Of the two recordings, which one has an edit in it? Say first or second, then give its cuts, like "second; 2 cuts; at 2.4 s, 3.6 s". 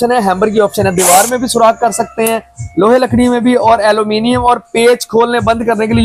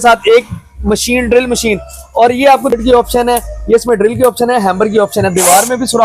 second; 1 cut; at 2.7 s